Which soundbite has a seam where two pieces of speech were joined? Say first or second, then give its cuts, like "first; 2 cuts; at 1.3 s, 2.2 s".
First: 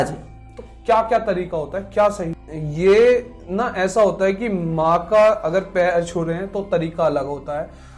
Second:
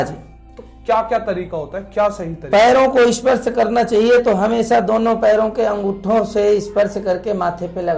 first; 1 cut; at 2.3 s